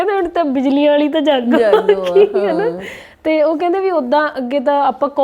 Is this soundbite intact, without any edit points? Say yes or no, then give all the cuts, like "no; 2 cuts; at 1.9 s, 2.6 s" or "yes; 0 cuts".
yes; 0 cuts